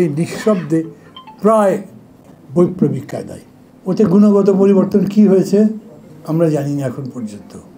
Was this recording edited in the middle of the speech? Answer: no; 0 cuts

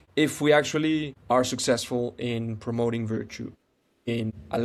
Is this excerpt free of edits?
yes; 0 cuts

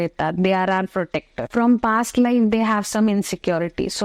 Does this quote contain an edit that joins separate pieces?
yes; 1 cut; at 1.5 s

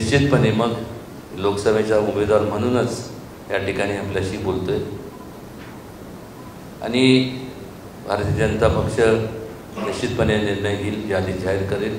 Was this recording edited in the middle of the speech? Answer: no; 0 cuts

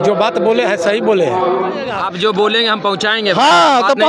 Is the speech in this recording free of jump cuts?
no; 1 cut; at 2.0 s

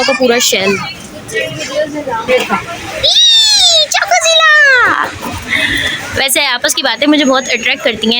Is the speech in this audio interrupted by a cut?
yes; 1 cut; at 2.3 s

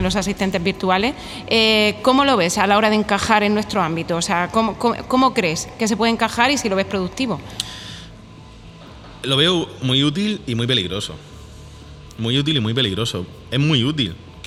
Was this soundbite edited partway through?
no; 0 cuts

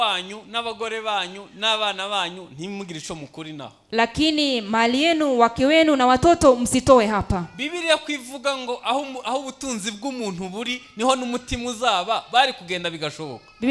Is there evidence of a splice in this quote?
no; 0 cuts

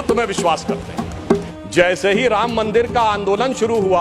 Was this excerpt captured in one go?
no; 1 cut; at 1.5 s

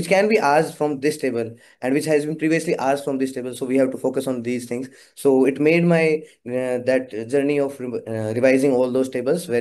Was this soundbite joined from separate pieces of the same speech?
no; 0 cuts

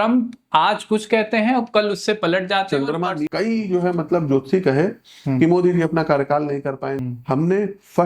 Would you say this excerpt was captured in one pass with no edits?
no; 2 cuts; at 3.2 s, 7.0 s

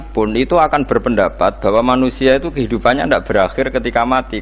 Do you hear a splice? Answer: no; 0 cuts

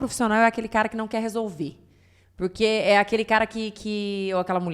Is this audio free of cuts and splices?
yes; 0 cuts

